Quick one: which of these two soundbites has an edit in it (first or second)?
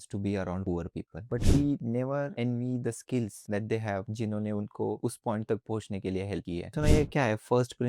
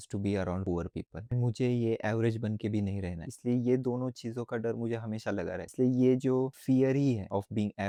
first